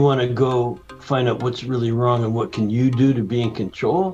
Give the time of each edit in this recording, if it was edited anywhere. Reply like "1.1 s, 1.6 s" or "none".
none